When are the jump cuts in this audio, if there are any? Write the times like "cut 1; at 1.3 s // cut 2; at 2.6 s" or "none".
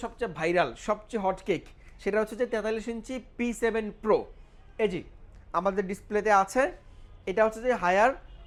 none

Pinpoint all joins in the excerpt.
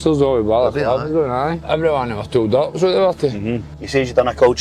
cut 1; at 1.6 s // cut 2; at 3.7 s

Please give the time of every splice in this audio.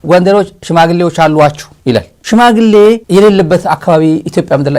cut 1; at 1.9 s // cut 2; at 3.0 s

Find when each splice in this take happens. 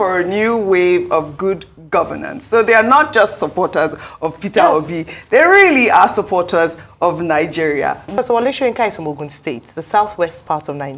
cut 1; at 8.1 s

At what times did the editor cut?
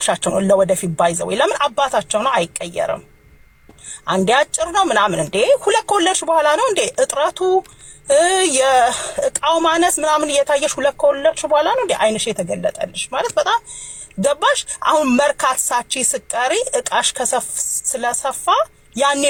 none

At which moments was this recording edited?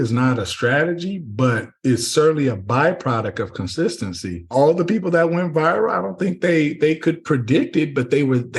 cut 1; at 4.5 s

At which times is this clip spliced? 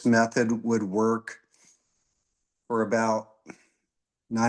none

